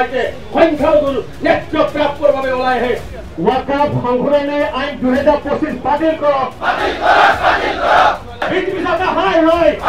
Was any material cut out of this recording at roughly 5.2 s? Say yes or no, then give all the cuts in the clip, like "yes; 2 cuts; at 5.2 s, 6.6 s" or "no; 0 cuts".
no; 2 cuts; at 3.1 s, 8.5 s